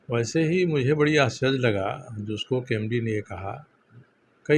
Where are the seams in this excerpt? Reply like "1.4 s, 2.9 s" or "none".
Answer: none